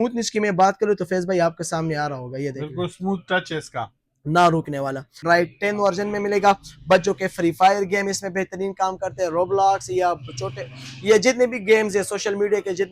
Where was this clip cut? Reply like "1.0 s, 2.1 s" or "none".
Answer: 5.2 s